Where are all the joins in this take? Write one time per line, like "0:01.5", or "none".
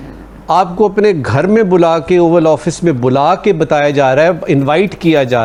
none